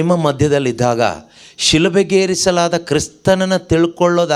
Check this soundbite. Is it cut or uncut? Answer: uncut